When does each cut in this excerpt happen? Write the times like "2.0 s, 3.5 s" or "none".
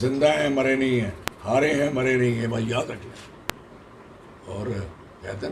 none